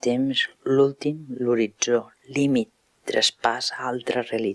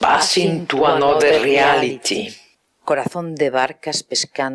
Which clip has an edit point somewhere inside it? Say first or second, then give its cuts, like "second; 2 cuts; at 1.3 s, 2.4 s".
first; 1 cut; at 2.2 s